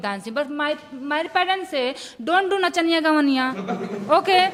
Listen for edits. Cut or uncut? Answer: uncut